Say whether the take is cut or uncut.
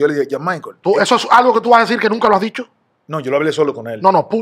uncut